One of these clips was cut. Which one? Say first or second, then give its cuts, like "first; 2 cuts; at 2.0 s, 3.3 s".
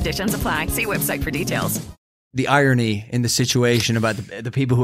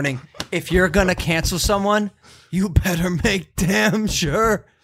first; 1 cut; at 2.2 s